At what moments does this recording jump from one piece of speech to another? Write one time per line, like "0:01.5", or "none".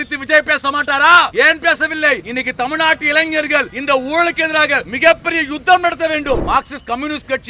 0:01.3
0:02.3
0:03.7
0:04.9
0:06.4